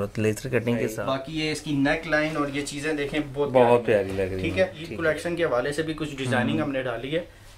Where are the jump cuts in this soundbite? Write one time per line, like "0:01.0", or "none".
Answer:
0:01.0
0:04.9